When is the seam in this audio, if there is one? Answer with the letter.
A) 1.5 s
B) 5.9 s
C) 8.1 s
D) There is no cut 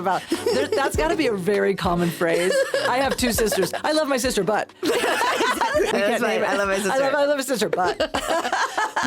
B